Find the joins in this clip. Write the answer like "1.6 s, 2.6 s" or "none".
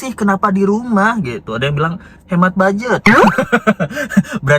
none